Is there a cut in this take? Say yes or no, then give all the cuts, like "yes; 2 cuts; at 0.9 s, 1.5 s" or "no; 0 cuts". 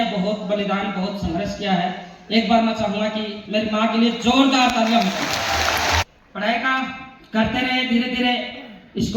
yes; 1 cut; at 6.2 s